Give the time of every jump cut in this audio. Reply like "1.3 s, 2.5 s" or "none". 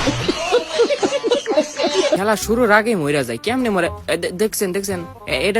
2.2 s